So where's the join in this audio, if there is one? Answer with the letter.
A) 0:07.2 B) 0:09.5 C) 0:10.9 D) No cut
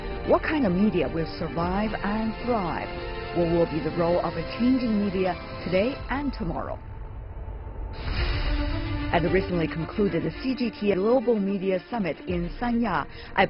C